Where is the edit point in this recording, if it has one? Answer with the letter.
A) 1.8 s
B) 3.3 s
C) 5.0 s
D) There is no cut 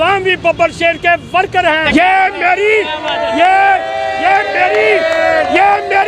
A